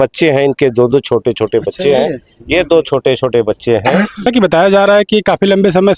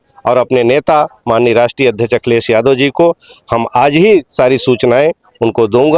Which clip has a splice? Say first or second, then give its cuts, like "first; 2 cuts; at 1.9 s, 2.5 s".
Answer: first; 1 cut; at 4.2 s